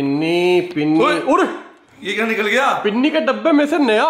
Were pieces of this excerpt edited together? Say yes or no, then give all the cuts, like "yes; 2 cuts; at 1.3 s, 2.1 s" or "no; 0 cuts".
no; 0 cuts